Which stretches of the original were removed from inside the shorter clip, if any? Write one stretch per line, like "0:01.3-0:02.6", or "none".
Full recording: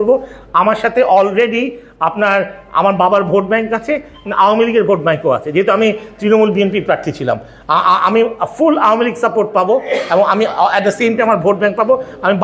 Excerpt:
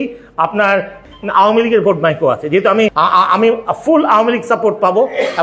0:02.7-0:04.1
0:06.0-0:07.7